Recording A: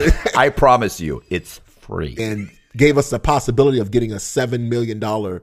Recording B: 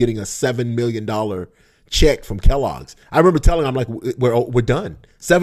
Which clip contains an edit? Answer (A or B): A